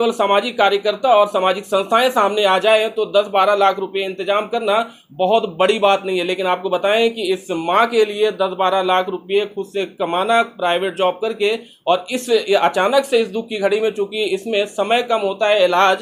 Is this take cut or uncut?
uncut